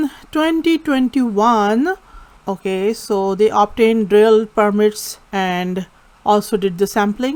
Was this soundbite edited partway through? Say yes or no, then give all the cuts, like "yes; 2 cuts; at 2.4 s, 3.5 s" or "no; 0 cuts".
no; 0 cuts